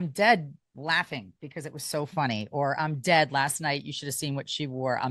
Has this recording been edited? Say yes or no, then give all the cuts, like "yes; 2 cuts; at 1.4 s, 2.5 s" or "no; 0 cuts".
no; 0 cuts